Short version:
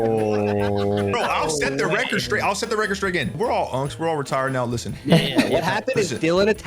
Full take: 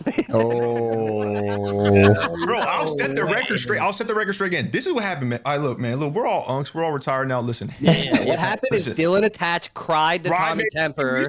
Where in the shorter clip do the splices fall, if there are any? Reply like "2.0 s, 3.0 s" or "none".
1.0 s, 3.3 s